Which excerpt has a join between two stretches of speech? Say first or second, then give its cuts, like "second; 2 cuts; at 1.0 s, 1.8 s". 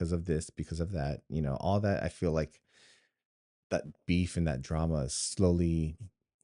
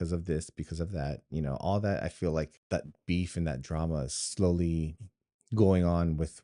second; 1 cut; at 2.6 s